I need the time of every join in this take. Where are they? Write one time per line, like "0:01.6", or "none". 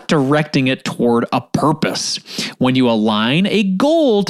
none

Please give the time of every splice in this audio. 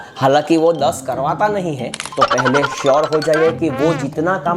0:02.0

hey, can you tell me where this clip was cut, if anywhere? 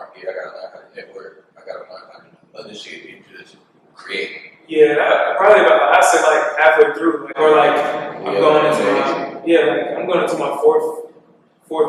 none

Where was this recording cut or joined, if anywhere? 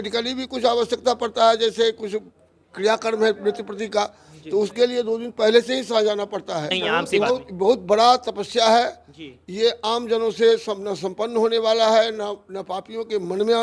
0:06.7

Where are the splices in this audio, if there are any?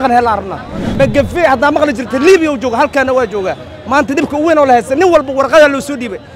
0:00.9

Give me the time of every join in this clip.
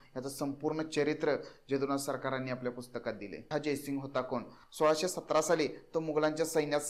0:03.5

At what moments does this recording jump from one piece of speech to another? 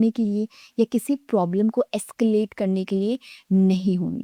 none

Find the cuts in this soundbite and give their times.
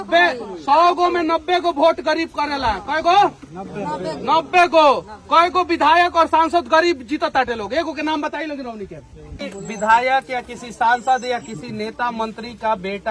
0:09.3

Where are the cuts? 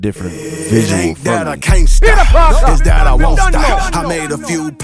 0:01.4

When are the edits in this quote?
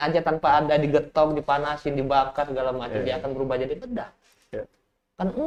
none

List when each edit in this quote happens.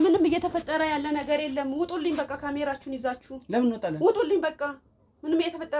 none

